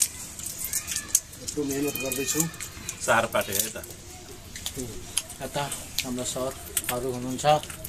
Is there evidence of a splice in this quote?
no; 0 cuts

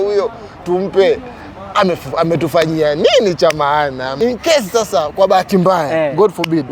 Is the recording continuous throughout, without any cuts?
no; 1 cut; at 4.1 s

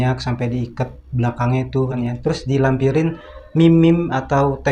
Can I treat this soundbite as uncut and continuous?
no; 1 cut; at 2.0 s

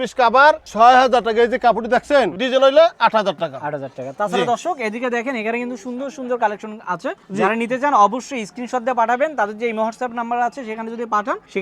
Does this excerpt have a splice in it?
no; 0 cuts

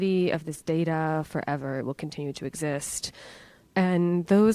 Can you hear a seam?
yes; 1 cut; at 3.5 s

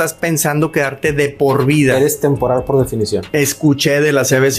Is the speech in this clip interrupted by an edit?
yes; 1 cut; at 3.3 s

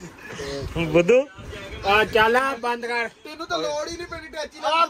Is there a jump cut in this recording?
no; 0 cuts

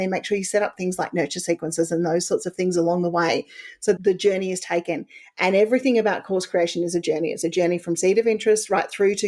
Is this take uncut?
no; 1 cut; at 4.0 s

